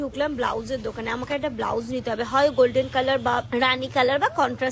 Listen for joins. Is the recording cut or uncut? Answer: uncut